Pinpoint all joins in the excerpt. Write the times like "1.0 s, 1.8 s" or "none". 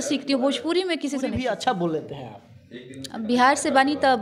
1.4 s